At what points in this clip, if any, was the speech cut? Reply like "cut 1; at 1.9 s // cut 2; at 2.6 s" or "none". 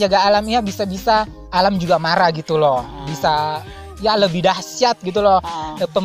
cut 1; at 1.4 s